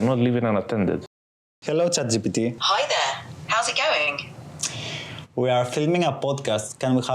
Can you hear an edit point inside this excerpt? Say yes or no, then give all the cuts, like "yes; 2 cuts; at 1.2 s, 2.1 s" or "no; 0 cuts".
yes; 1 cut; at 1.2 s